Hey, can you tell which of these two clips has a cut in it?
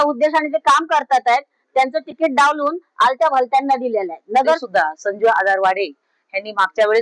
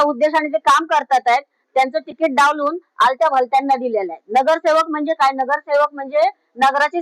first; 1 cut; at 4.6 s

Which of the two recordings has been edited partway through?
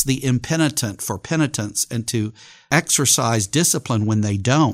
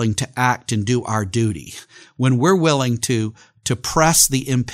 first; 1 cut; at 2.5 s

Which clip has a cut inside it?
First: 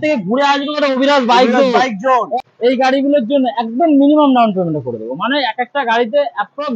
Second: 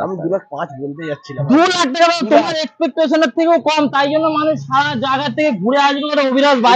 first; 1 cut; at 2.4 s

